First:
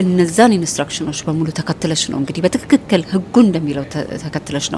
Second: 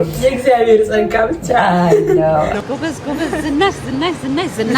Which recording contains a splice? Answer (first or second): second